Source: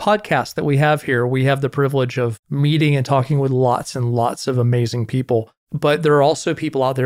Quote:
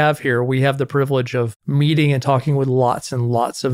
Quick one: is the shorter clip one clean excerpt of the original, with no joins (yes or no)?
yes